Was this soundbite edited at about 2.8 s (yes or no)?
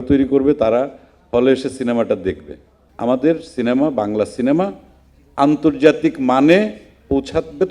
yes